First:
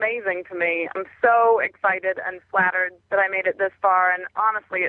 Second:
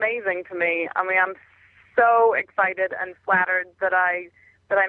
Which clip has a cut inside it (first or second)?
first